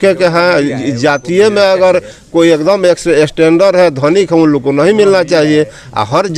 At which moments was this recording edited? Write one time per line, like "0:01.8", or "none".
none

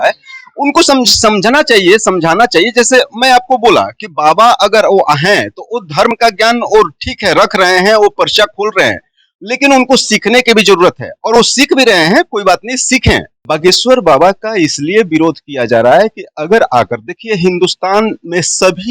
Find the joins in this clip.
0:13.3

